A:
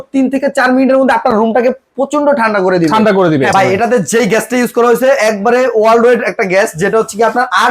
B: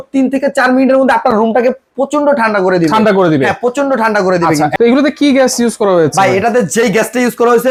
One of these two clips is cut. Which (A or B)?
A